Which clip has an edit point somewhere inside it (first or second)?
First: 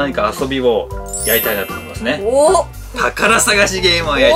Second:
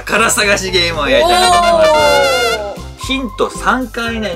second